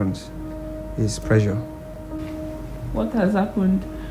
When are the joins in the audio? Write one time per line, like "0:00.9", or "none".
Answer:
0:02.0